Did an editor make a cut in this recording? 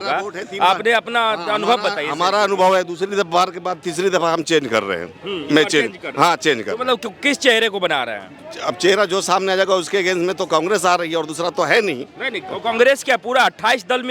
no; 0 cuts

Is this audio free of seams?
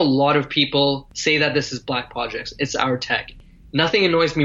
no; 2 cuts; at 1.1 s, 3.4 s

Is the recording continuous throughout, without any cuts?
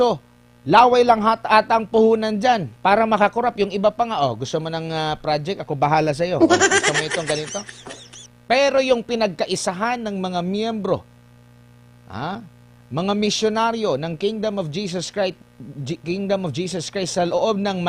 yes; 0 cuts

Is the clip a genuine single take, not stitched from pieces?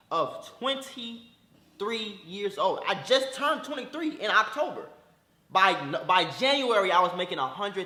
yes; 0 cuts

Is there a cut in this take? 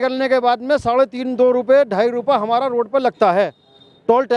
no; 0 cuts

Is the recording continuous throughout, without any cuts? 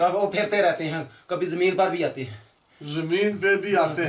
yes; 0 cuts

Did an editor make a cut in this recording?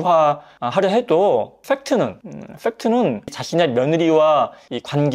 yes; 1 cut; at 3.3 s

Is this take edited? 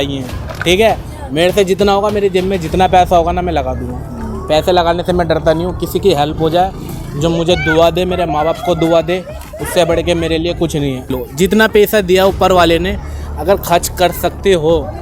yes; 1 cut; at 11.1 s

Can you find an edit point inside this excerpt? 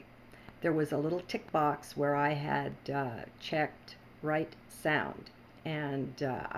yes; 1 cut; at 4.4 s

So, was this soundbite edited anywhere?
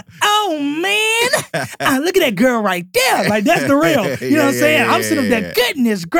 no; 0 cuts

